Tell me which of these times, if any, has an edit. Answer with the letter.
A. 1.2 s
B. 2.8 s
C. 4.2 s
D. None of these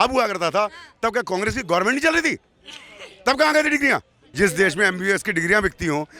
C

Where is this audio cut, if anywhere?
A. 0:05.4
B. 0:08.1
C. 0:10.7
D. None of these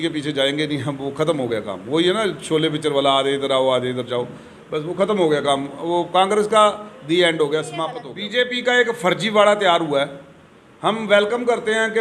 B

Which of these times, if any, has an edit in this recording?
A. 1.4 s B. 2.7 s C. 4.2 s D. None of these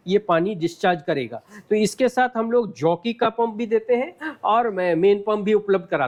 D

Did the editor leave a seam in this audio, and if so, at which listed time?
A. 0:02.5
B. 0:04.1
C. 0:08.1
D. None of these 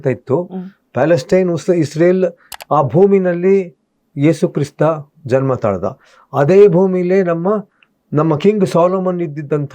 A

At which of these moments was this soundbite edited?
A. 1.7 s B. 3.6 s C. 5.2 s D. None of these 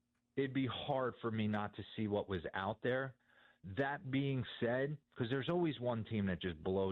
D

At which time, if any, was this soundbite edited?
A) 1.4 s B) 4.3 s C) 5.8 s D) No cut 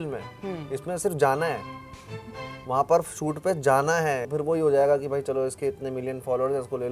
B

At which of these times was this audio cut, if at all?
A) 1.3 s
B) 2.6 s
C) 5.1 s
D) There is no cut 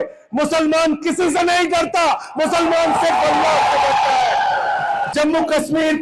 C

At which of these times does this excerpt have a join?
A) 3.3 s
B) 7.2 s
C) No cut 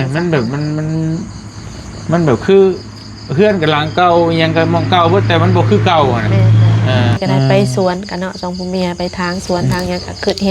B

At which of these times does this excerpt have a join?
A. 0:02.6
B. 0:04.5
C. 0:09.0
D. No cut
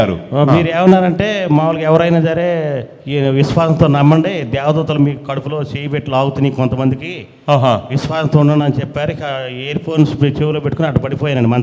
D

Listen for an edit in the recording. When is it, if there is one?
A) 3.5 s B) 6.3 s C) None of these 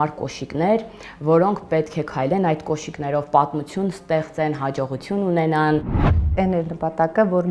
B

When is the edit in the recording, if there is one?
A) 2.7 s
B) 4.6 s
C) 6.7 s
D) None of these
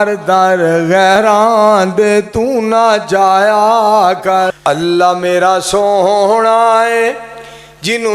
B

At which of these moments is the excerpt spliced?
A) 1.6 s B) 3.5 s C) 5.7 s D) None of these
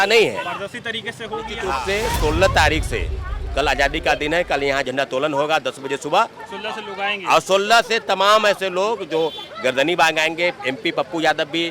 A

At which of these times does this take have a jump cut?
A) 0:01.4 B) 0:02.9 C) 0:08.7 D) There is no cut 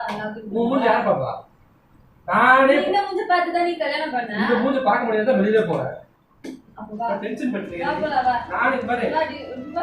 D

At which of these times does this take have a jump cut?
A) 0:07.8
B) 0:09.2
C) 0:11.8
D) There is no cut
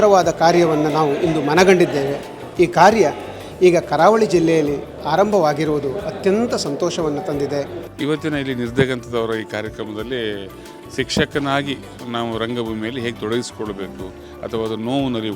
A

